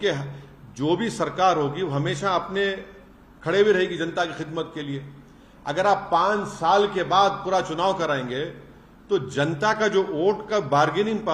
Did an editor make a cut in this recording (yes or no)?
no